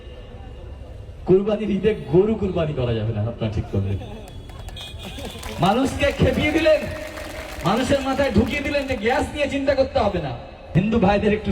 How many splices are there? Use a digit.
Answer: 1